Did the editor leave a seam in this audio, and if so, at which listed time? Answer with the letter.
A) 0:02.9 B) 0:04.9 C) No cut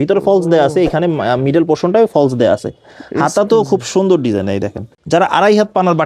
B